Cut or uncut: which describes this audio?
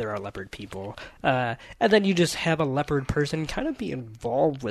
uncut